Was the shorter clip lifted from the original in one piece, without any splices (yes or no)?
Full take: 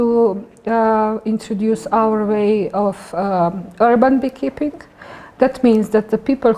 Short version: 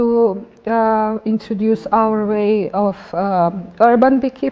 yes